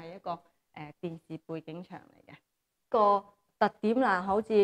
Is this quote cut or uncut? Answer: cut